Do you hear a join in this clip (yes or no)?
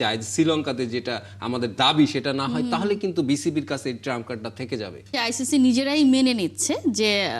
yes